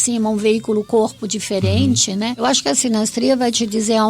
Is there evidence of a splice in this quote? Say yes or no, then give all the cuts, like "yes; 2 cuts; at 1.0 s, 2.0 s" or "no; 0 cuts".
yes; 1 cut; at 2.4 s